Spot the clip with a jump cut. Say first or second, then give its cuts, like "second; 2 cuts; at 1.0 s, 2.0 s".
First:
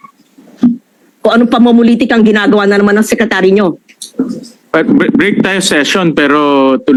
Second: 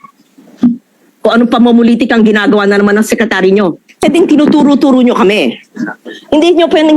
second; 1 cut; at 4.0 s